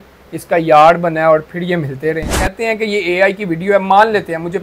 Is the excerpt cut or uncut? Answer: cut